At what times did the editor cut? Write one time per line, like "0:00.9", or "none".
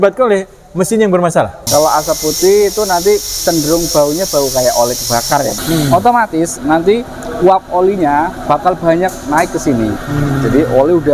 0:01.6
0:05.5
0:09.9